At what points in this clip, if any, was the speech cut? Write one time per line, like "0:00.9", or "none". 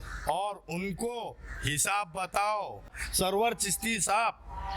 0:03.0